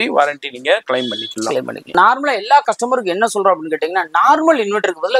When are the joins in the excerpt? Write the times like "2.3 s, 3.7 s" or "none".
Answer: 1.9 s